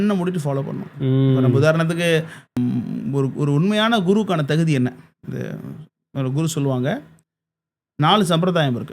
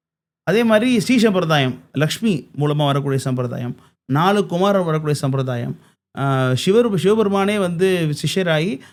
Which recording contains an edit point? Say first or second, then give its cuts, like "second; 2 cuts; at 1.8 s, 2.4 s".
first; 1 cut; at 2.6 s